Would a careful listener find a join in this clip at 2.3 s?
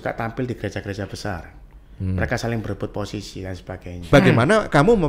no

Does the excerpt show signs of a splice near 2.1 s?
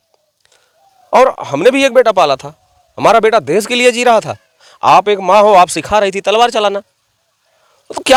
no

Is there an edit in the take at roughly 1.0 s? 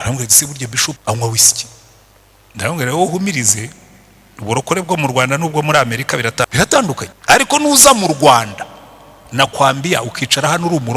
yes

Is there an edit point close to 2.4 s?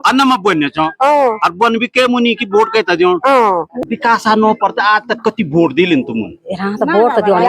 no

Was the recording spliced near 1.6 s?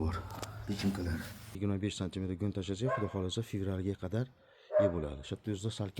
yes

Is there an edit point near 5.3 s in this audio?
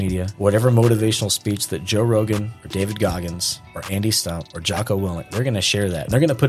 yes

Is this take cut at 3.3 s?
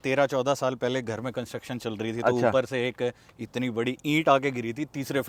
no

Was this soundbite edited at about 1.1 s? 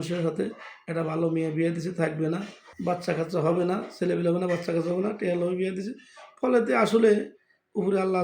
no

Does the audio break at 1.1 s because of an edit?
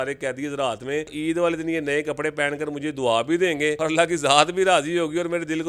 yes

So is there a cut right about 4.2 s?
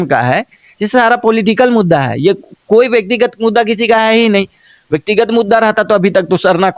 no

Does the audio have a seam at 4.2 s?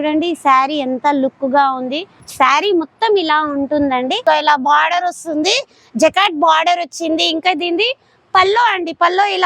yes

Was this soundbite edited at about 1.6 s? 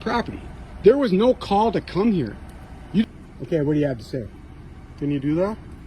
no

